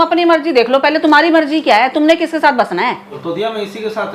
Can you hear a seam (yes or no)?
yes